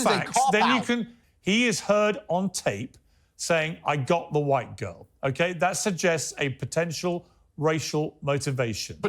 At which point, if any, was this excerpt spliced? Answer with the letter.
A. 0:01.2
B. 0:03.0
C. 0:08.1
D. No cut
A